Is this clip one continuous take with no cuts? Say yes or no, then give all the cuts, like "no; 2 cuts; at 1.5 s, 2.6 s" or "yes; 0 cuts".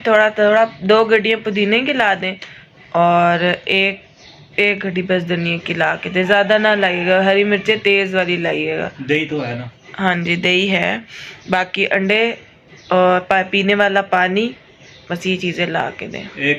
yes; 0 cuts